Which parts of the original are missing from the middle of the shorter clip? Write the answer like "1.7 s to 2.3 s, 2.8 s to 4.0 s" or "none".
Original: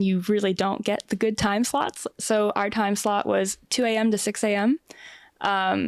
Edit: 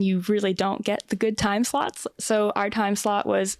none